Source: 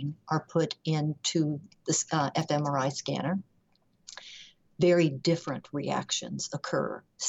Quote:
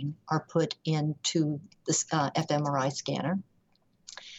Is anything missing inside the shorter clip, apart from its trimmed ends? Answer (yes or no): no